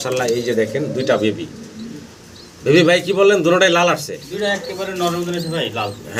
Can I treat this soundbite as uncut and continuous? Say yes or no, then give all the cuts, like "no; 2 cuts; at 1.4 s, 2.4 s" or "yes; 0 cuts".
yes; 0 cuts